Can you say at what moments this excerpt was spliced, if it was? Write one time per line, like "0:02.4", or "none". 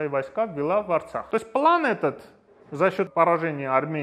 0:01.2
0:03.1